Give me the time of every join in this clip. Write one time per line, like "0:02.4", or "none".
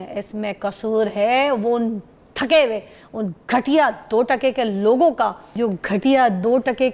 0:05.5